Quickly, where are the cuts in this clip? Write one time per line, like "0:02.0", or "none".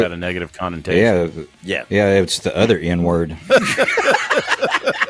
0:03.4